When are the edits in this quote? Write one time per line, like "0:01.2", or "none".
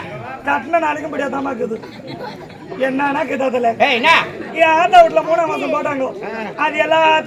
none